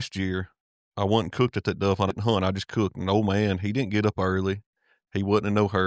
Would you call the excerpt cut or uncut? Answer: cut